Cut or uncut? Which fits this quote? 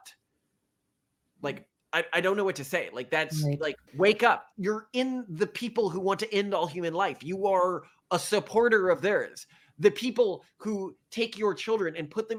uncut